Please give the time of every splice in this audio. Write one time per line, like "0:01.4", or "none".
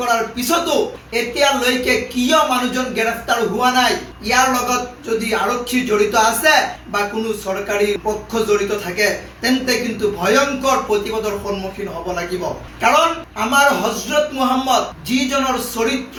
none